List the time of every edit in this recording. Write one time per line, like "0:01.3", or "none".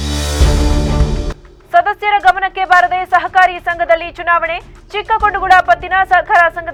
none